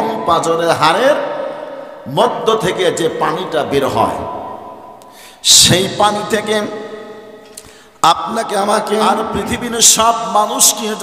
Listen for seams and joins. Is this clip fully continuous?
no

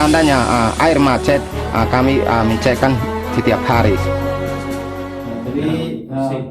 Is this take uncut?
no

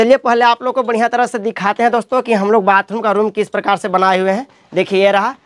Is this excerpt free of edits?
yes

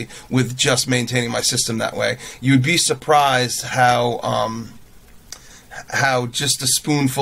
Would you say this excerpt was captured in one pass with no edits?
yes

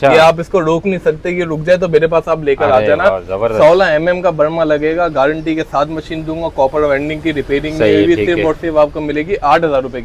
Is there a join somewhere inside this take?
no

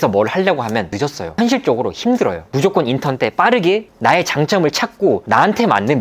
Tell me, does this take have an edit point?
yes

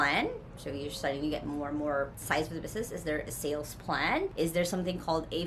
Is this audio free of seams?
yes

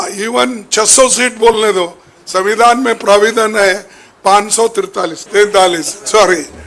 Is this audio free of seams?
no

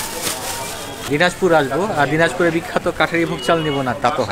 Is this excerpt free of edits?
no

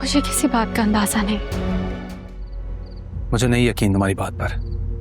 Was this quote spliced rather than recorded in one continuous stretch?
yes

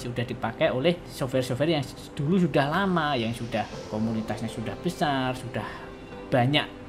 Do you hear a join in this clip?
yes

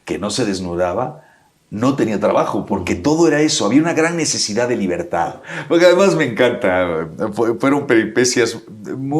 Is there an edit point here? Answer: yes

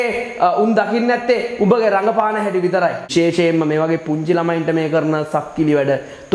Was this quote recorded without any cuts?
no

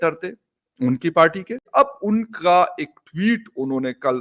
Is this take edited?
yes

